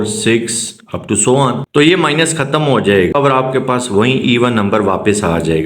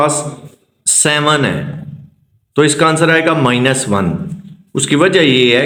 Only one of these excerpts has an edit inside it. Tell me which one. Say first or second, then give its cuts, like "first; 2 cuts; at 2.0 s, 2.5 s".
first; 2 cuts; at 1.6 s, 3.1 s